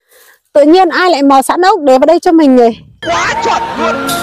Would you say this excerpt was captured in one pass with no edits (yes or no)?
no